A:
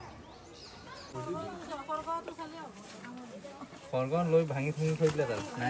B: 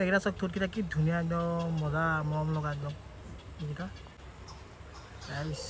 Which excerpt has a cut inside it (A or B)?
A